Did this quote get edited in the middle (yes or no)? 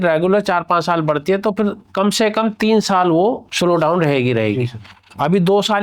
no